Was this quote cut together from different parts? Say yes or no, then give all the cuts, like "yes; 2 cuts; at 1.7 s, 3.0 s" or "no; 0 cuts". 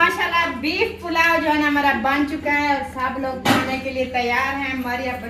no; 0 cuts